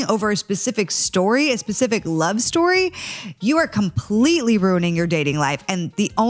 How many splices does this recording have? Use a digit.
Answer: 0